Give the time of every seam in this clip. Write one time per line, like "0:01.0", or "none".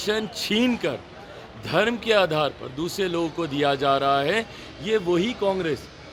none